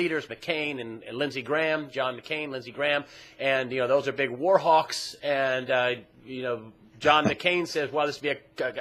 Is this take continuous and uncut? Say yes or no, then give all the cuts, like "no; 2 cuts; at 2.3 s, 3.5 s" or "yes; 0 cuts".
no; 1 cut; at 6.7 s